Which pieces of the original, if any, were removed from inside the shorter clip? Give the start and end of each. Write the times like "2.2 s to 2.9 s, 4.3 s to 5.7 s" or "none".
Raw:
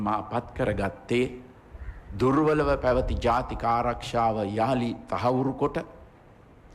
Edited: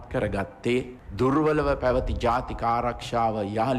1.4 s to 2.0 s

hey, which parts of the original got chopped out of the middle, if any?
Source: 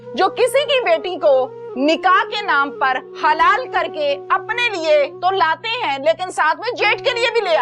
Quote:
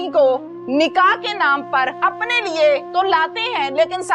3.0 s to 4.2 s

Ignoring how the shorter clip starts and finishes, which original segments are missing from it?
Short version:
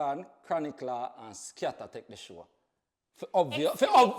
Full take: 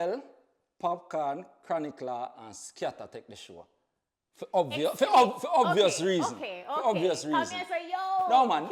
none

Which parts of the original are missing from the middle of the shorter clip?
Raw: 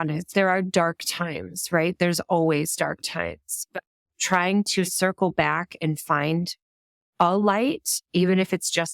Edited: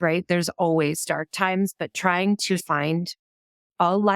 3.0 s to 3.6 s, 4.9 s to 6.1 s

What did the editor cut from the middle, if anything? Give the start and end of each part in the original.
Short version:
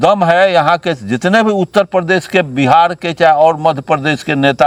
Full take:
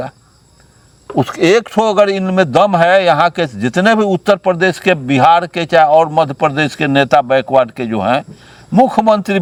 none

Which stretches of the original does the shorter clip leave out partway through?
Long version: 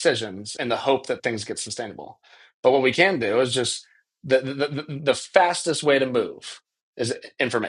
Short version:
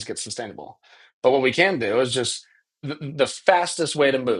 4.2 s to 4.7 s

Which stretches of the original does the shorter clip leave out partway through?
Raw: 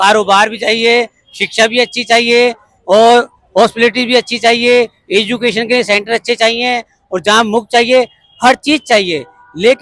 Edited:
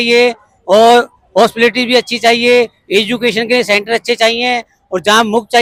none

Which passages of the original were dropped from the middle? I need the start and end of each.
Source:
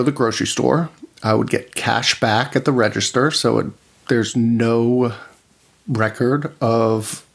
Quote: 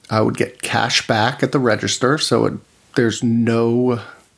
none

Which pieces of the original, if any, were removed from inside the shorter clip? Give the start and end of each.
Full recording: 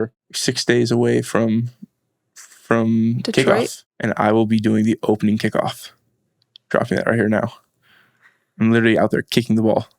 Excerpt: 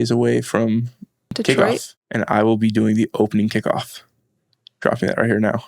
2.1 s to 3.2 s

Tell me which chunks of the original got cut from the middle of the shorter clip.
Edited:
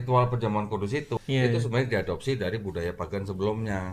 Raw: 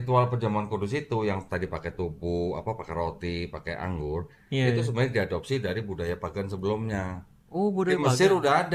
1.2 s to 4.4 s

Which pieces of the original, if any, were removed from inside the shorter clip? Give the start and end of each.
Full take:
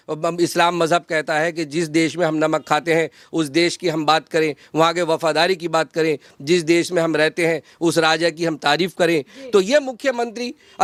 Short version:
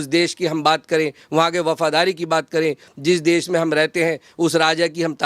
none

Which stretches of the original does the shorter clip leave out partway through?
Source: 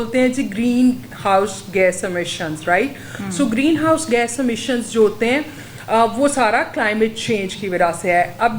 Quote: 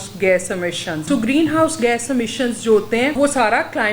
2.5 s to 3.3 s, 5.4 s to 6.1 s

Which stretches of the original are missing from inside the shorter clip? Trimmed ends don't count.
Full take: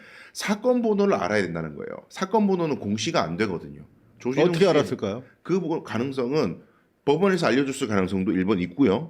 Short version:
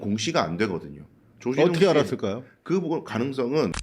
none

